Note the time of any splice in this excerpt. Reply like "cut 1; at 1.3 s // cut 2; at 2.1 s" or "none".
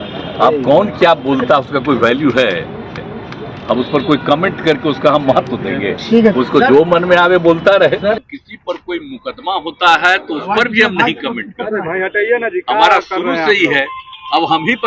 cut 1; at 8.2 s